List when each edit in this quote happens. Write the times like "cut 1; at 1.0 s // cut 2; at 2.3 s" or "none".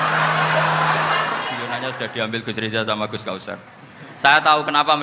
cut 1; at 1.7 s